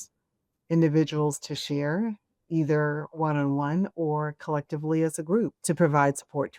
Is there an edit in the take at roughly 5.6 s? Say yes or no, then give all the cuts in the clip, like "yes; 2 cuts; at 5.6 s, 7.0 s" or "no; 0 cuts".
yes; 1 cut; at 5.6 s